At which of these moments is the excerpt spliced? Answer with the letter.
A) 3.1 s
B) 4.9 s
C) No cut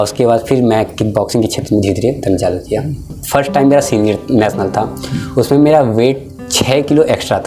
A